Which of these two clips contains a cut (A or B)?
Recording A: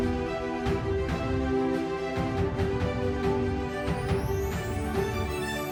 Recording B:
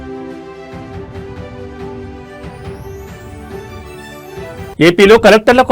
B